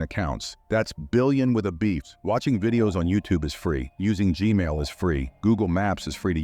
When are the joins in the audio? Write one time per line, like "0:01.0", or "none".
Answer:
0:02.1